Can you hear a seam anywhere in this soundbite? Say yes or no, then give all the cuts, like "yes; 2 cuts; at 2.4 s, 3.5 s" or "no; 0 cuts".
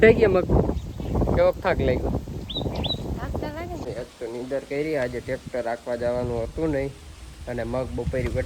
yes; 1 cut; at 3.9 s